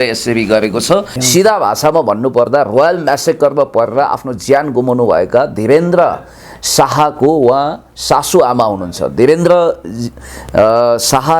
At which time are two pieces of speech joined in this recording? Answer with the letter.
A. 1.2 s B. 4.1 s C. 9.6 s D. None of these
A